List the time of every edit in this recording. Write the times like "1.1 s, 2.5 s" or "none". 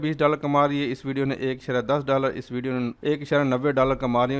3.0 s